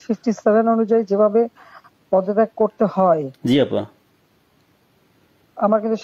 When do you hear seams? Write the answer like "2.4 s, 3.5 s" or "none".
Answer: none